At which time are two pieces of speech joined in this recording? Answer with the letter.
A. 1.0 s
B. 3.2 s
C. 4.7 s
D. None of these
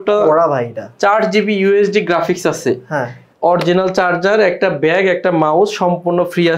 B